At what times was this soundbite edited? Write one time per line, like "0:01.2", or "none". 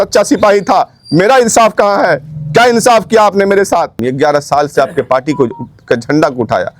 0:04.1